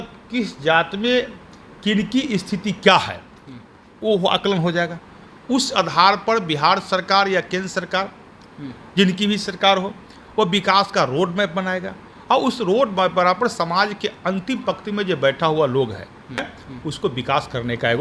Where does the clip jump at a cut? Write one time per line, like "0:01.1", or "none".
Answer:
0:16.6